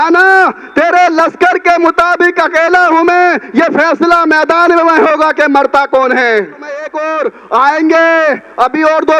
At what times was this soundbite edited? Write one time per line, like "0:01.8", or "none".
0:07.0